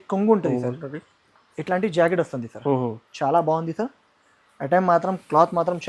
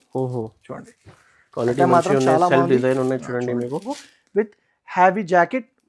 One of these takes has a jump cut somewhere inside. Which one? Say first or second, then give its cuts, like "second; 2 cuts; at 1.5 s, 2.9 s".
second; 1 cut; at 4.0 s